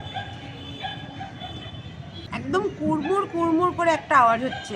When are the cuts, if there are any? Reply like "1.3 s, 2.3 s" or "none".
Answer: 2.3 s